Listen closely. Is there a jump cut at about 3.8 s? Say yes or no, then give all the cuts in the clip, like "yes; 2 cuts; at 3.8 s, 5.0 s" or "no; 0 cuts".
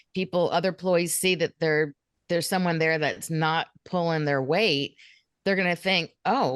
no; 1 cut; at 2.1 s